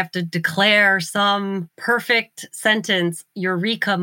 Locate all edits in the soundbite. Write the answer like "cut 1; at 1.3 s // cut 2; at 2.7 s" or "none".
cut 1; at 1.7 s